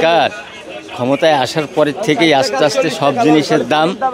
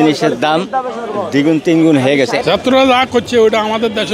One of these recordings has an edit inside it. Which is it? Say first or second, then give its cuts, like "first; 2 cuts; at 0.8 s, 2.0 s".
second; 1 cut; at 2.4 s